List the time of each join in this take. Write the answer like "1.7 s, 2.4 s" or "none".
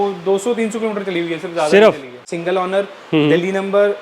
2.3 s